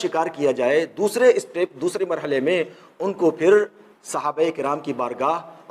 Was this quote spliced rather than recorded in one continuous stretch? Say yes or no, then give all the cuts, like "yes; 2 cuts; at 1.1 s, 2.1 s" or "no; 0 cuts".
no; 0 cuts